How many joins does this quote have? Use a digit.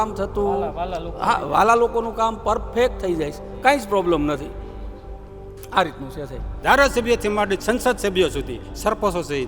1